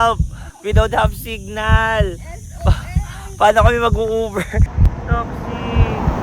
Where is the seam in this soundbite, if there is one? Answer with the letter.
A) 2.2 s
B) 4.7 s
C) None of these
B